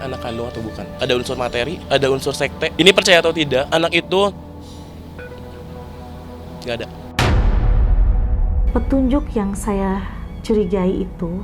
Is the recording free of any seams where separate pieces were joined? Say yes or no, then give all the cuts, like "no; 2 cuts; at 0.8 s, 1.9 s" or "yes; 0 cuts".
no; 5 cuts; at 0.8 s, 1.8 s, 2.7 s, 3.7 s, 8.5 s